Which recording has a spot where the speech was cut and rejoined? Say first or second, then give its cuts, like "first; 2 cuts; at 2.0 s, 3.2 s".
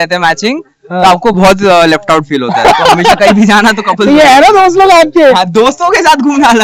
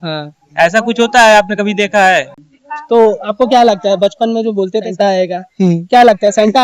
second; 2 cuts; at 2.3 s, 4.9 s